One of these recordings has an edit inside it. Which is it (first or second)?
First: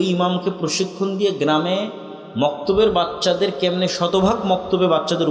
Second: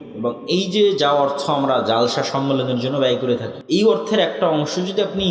second